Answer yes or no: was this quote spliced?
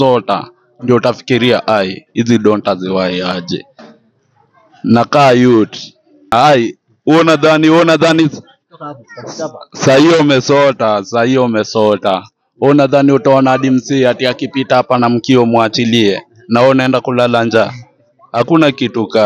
yes